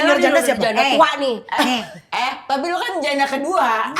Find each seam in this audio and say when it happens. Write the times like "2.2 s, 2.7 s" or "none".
none